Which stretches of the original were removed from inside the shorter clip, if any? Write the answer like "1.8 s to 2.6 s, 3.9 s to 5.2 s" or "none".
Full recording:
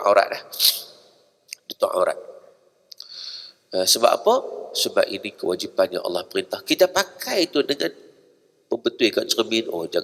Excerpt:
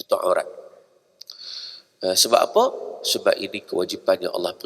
none

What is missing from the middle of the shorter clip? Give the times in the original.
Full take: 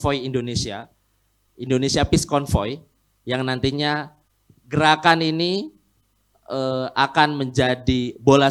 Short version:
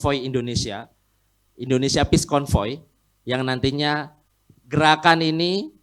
none

